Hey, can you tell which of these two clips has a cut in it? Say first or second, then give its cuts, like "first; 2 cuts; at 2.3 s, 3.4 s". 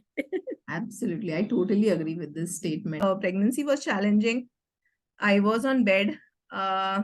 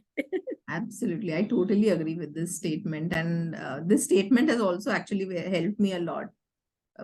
first; 1 cut; at 3.0 s